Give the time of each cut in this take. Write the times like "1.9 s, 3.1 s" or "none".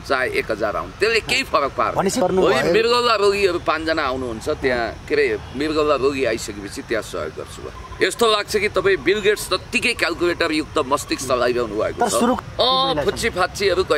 2.2 s, 7.8 s, 12.4 s